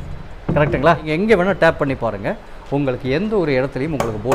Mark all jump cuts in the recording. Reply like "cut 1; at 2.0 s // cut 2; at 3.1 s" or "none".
cut 1; at 1.1 s